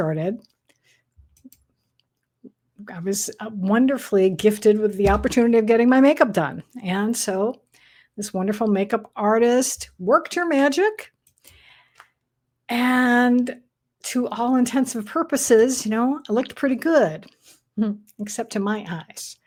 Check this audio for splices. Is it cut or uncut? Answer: uncut